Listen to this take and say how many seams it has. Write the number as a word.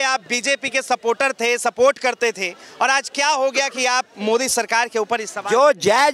zero